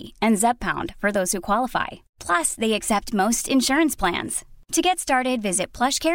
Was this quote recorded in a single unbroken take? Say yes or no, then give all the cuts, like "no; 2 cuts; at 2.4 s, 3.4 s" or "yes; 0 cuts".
yes; 0 cuts